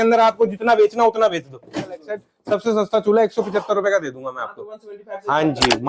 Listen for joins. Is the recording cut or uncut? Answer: cut